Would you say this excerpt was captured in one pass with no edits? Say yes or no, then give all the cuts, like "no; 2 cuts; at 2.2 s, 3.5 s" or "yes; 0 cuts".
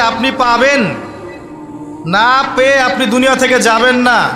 yes; 0 cuts